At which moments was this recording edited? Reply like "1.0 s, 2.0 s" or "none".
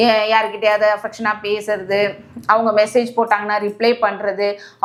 none